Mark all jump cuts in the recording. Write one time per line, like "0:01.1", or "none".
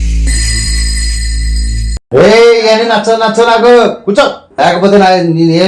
none